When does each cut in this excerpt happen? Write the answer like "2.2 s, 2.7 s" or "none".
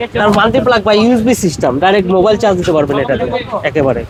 none